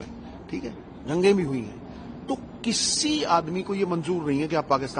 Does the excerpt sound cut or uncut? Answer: uncut